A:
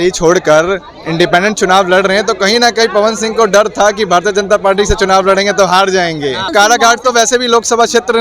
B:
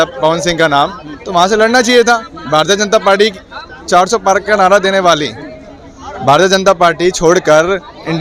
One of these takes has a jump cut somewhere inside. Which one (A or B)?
A